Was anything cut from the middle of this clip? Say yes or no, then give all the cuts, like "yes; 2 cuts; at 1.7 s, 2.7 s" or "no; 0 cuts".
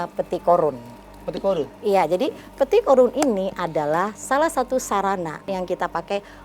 yes; 1 cut; at 5.5 s